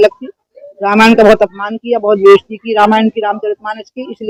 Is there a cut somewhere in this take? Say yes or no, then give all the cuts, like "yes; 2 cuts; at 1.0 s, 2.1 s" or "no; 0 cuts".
no; 0 cuts